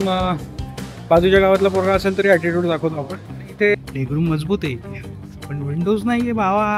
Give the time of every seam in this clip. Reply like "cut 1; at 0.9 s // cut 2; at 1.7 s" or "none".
cut 1; at 3.7 s